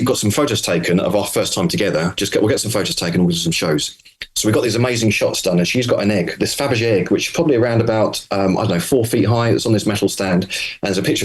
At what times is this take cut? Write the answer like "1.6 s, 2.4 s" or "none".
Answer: none